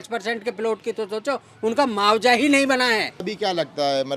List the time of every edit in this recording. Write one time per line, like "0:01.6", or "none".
0:03.2